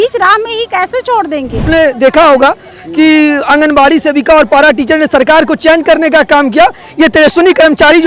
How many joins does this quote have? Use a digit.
1